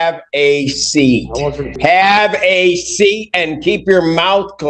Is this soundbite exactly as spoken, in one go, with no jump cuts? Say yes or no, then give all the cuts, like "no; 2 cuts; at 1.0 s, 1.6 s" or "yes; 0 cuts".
no; 1 cut; at 1.8 s